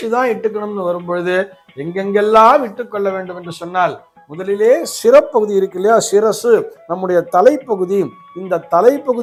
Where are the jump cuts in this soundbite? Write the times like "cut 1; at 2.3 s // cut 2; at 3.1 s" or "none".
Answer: none